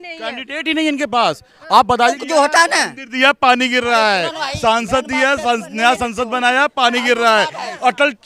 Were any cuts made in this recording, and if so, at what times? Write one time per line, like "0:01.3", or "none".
0:02.2